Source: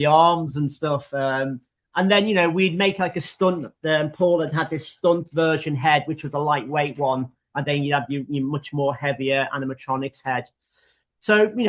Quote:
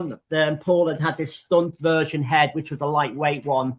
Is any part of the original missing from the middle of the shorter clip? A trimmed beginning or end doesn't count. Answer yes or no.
no